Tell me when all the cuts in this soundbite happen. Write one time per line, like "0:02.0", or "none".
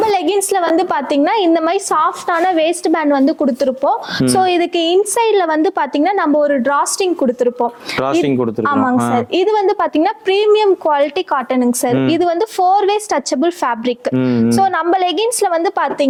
none